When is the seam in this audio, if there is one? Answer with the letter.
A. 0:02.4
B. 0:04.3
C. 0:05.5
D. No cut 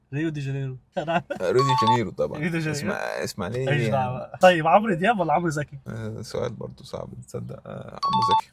D